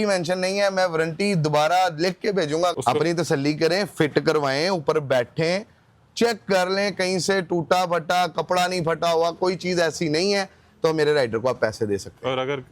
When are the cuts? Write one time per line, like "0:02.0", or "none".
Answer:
0:02.7

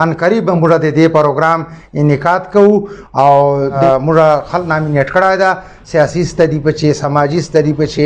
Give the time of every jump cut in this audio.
0:03.8

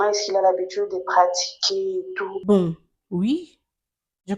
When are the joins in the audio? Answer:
0:02.4

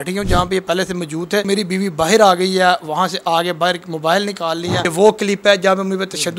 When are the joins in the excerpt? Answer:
0:01.5
0:04.9

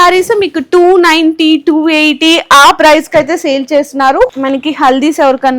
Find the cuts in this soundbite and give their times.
0:04.3

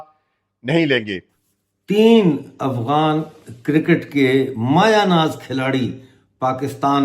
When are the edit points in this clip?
0:01.6

